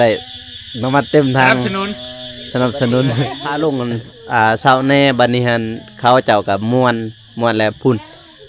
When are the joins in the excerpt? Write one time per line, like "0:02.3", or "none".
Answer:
0:03.4